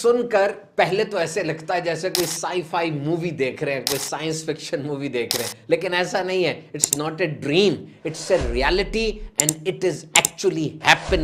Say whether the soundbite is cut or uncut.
uncut